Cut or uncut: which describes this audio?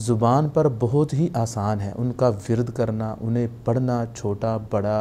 uncut